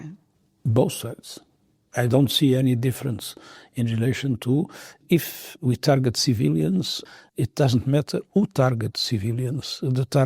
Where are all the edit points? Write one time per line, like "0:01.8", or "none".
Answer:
0:04.9

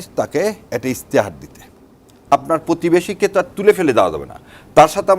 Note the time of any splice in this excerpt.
0:02.3

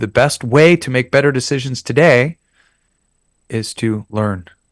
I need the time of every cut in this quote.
none

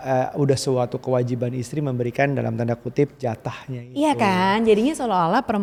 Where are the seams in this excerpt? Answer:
none

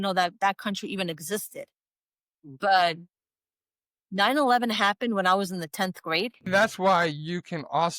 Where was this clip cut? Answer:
0:06.4

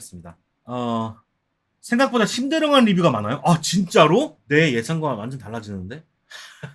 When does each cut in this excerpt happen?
0:04.4

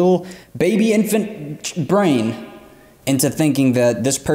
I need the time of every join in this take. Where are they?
none

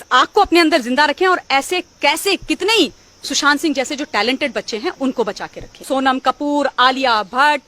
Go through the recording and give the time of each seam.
0:05.8

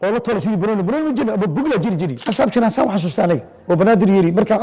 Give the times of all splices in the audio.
0:02.2

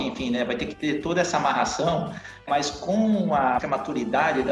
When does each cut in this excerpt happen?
0:02.4
0:03.6

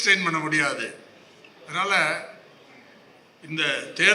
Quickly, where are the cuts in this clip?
none

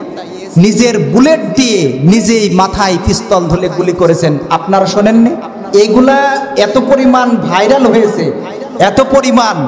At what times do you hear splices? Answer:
0:05.6

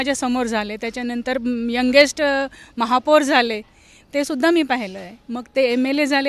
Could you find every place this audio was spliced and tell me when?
none

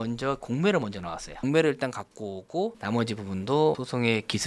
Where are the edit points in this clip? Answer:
0:01.3
0:02.8

